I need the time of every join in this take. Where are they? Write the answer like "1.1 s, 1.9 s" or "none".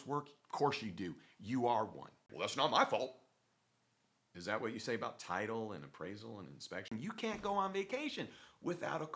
2.2 s, 6.9 s